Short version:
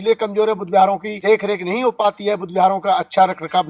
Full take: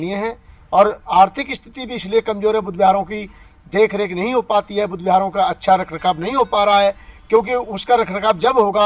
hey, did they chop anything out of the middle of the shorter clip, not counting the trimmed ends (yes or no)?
yes